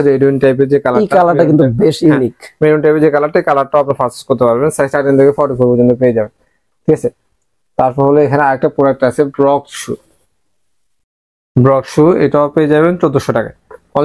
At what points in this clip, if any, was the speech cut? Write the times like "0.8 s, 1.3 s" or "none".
none

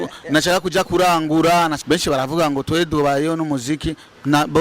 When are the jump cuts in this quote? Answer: 1.8 s

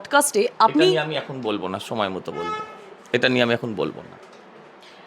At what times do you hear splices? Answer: none

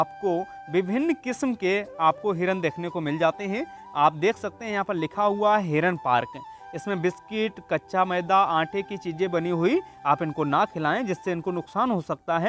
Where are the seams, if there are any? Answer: none

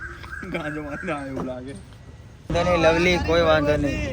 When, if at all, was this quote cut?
2.4 s

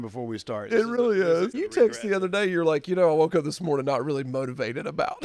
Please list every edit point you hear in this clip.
1.5 s

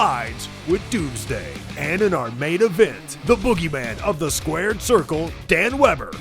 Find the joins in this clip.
1.8 s

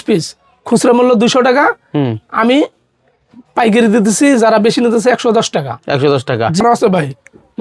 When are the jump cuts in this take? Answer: 6.6 s

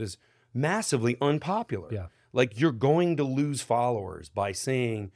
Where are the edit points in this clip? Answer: none

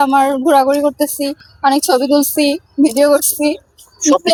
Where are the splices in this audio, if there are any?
none

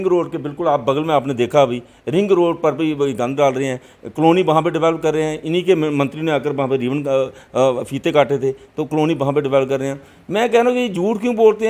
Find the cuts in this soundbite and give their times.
none

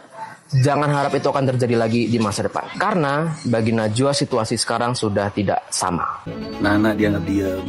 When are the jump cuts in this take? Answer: 6.2 s

